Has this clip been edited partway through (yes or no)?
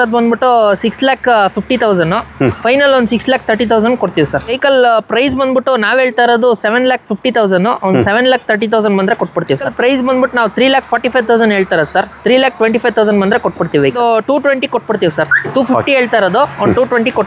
yes